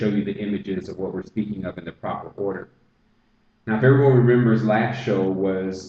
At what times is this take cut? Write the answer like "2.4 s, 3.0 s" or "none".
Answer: none